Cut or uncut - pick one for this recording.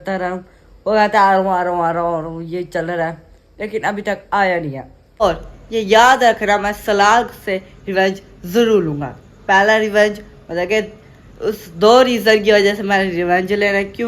cut